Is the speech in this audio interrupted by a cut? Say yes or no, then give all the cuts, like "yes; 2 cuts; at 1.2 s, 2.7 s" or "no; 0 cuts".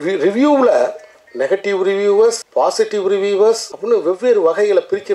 yes; 2 cuts; at 2.4 s, 3.7 s